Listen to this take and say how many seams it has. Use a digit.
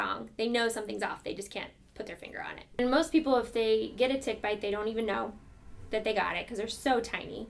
1